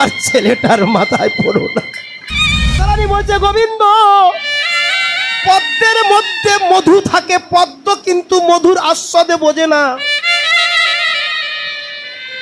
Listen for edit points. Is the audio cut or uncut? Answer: cut